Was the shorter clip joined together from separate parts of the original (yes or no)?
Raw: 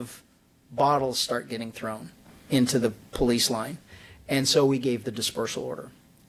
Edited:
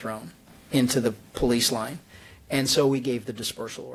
no